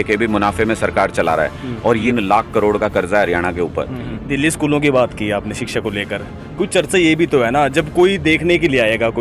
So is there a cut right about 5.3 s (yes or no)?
no